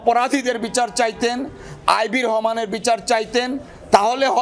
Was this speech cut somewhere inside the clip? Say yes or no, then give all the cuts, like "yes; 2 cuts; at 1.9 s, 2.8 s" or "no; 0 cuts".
no; 0 cuts